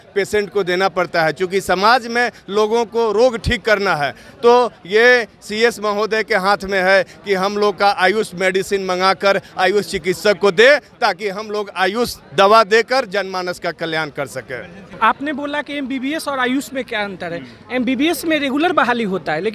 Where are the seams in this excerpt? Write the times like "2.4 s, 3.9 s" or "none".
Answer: 14.8 s